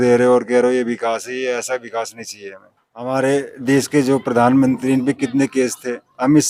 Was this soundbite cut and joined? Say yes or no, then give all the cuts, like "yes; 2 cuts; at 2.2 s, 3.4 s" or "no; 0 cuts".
yes; 1 cut; at 3.1 s